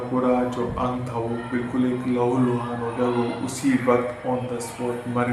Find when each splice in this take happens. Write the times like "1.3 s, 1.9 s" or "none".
none